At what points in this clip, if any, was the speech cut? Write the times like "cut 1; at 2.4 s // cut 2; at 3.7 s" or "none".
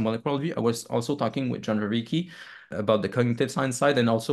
cut 1; at 2.7 s